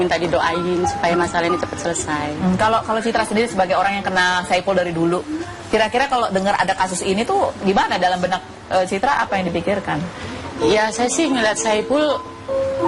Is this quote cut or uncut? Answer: uncut